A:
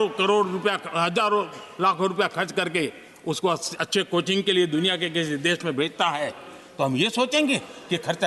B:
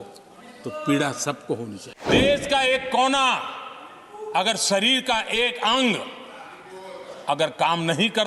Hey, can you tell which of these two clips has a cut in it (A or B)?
B